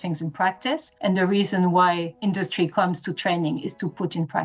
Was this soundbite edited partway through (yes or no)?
yes